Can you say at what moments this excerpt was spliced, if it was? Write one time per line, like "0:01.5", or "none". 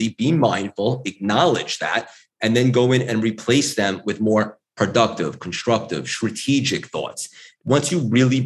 0:07.5